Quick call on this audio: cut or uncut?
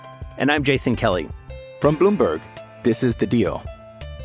uncut